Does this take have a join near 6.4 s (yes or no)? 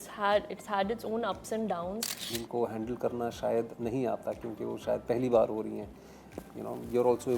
no